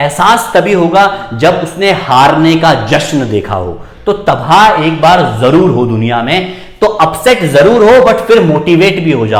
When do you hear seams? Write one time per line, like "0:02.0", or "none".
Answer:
none